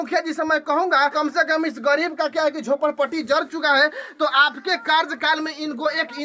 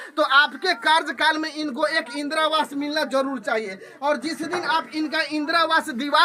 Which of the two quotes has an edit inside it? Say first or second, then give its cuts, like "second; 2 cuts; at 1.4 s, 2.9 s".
first; 1 cut; at 1.1 s